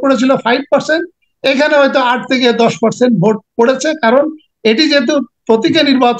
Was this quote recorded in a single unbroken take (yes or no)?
yes